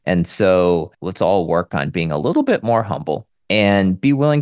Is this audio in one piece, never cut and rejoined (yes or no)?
no